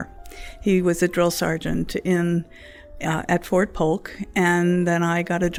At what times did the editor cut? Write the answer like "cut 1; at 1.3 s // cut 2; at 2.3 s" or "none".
none